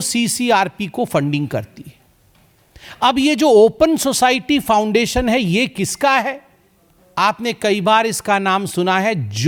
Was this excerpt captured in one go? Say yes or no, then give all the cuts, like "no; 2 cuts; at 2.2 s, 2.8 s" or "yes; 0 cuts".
yes; 0 cuts